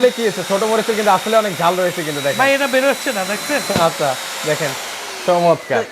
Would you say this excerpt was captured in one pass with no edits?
yes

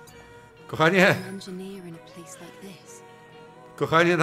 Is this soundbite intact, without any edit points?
yes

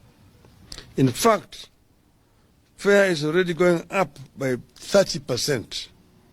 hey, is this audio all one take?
yes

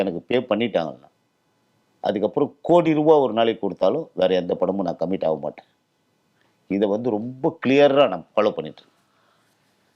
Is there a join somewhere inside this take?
no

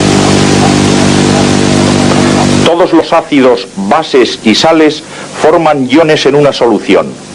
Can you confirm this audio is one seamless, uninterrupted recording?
yes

